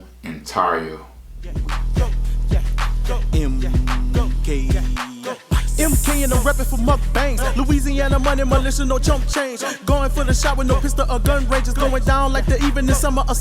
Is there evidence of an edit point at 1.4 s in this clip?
yes; 1 cut; at 1.4 s

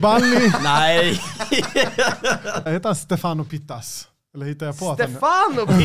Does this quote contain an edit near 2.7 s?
yes; 1 cut; at 2.7 s

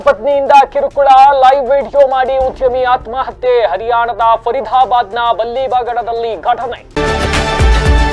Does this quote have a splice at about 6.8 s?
yes; 1 cut; at 6.8 s

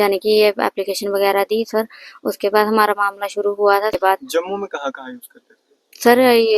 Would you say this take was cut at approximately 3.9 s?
yes; 1 cut; at 3.9 s

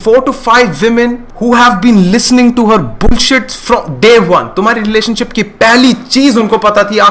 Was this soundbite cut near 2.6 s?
no; 1 cut; at 1.3 s

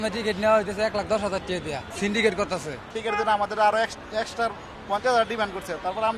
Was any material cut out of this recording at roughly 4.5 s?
no; 2 cuts; at 1.9 s, 2.9 s

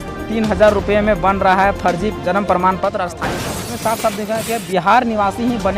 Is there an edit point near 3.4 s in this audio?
yes; 1 cut; at 3.4 s

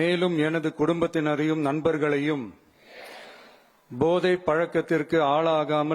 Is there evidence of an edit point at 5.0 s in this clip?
no; 1 cut; at 3.0 s

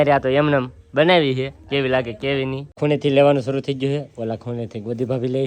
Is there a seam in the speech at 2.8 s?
yes; 1 cut; at 2.8 s

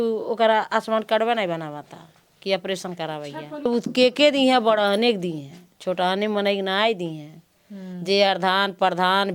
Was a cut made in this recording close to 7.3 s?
no; 1 cut; at 3.7 s

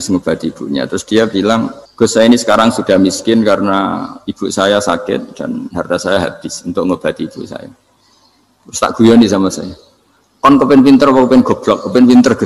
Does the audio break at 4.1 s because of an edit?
no; 1 cut; at 1.8 s

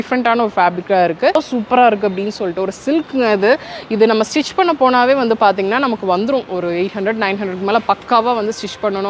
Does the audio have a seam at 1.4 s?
yes; 1 cut; at 1.4 s

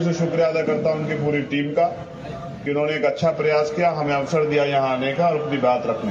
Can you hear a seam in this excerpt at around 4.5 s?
no; 2 cuts; at 1.3 s, 3.3 s

